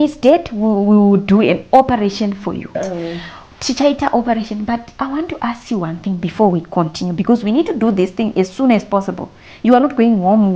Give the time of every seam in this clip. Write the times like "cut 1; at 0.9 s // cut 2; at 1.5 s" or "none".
cut 1; at 2.8 s